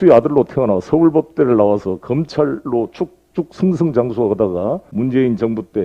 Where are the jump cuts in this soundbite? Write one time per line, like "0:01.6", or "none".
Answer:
0:04.9